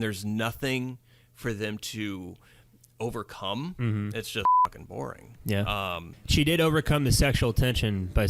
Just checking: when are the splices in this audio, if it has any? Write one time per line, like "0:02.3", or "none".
0:06.1